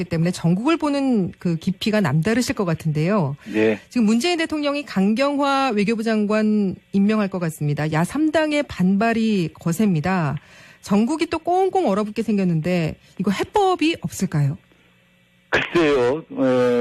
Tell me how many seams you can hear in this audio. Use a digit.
1